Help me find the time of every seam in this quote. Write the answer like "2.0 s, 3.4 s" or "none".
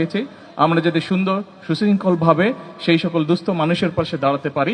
none